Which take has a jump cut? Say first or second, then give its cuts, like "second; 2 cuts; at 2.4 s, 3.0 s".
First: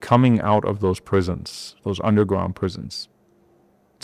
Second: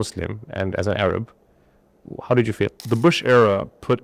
second; 1 cut; at 2.8 s